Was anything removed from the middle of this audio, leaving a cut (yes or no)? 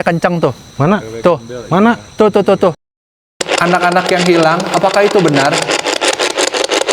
yes